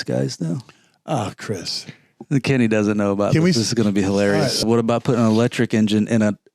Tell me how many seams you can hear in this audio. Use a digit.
1